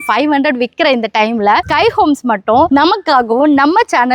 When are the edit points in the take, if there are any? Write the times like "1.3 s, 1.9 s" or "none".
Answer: none